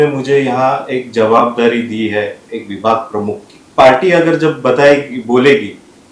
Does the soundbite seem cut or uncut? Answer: cut